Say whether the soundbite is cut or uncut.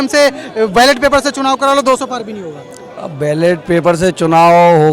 uncut